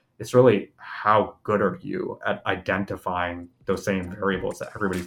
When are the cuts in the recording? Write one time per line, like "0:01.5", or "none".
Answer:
none